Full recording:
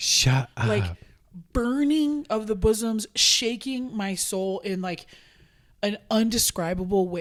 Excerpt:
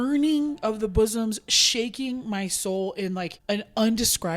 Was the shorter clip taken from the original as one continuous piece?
no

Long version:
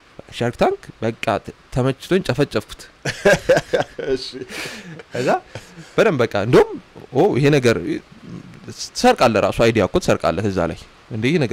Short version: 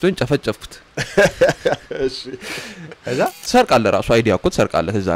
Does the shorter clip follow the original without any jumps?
no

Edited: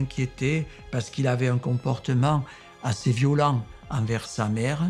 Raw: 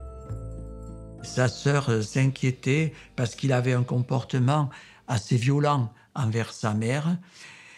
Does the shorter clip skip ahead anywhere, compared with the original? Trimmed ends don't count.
no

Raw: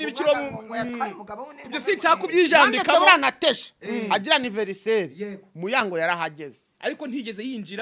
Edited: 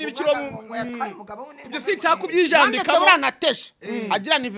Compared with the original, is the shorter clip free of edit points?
yes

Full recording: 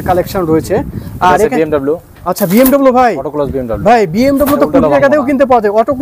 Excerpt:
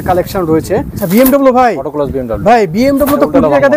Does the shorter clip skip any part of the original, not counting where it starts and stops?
yes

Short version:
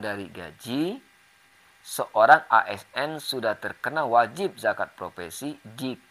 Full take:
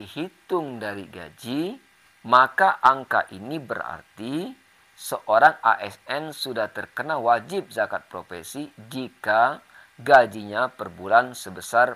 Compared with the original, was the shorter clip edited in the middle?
yes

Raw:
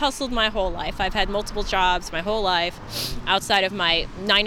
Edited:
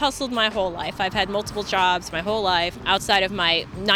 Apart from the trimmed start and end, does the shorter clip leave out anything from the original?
yes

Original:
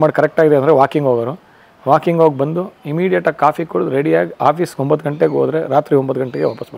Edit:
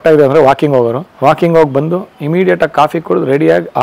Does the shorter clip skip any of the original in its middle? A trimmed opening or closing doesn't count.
yes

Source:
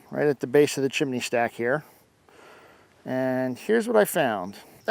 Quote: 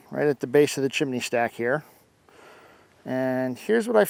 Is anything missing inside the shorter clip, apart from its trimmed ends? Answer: no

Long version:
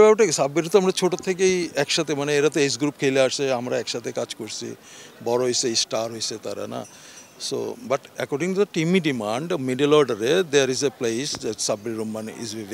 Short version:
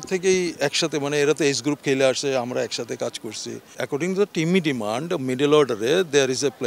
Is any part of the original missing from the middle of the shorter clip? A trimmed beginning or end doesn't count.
yes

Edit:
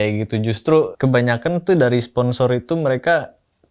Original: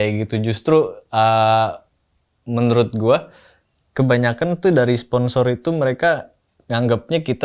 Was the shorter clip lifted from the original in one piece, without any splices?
no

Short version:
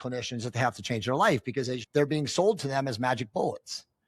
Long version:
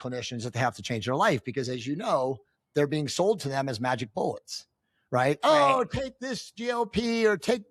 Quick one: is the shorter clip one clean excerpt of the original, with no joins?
no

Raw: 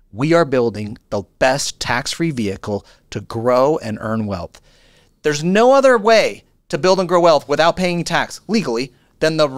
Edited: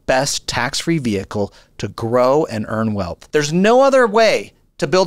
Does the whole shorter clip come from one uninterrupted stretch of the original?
no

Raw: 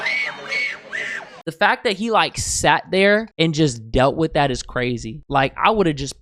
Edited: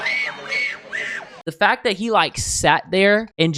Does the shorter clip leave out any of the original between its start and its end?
no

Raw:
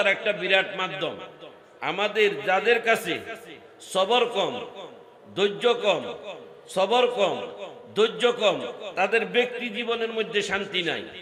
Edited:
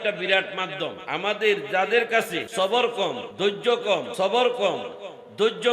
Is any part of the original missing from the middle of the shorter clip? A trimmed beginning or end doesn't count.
yes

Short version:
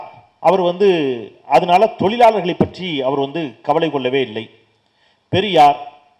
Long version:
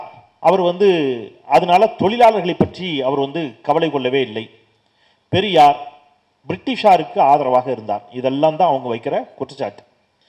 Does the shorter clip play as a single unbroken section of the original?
yes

